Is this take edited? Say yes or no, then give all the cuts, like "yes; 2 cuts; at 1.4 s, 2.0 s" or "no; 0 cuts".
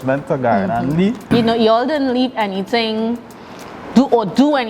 yes; 1 cut; at 1.2 s